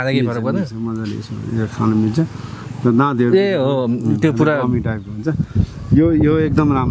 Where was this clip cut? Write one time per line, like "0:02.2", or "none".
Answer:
none